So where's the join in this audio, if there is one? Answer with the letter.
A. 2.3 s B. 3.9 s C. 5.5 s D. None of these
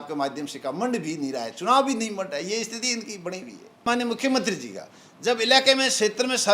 B